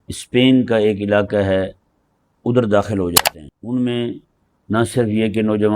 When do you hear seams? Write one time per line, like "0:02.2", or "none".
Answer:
0:03.2